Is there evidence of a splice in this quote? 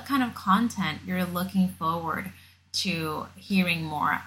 no; 0 cuts

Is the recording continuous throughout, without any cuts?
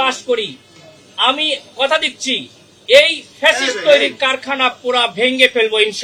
yes; 0 cuts

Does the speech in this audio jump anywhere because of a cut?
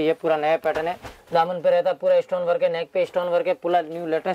no; 0 cuts

